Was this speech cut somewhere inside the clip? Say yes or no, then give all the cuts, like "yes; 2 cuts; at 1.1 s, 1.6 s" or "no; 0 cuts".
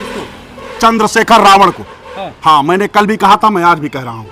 no; 0 cuts